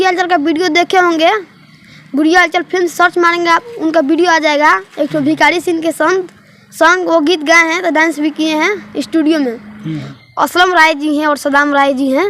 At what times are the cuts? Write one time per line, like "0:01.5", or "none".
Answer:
0:10.2